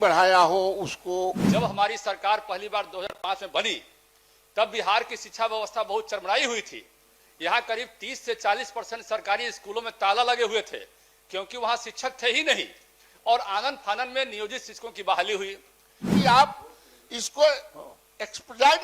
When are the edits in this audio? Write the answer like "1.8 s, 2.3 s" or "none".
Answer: 1.4 s, 16.1 s